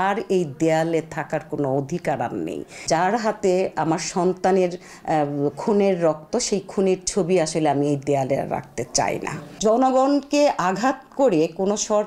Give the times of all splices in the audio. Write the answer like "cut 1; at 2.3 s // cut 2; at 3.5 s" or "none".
cut 1; at 2.8 s // cut 2; at 9.6 s